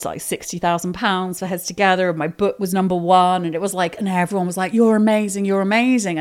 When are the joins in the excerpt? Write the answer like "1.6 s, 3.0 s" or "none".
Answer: none